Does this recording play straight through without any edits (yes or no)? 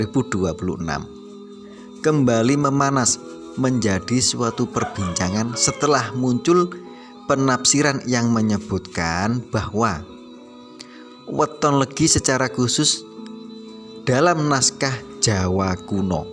yes